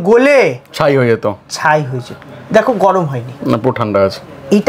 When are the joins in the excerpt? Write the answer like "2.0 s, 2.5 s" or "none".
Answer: 2.2 s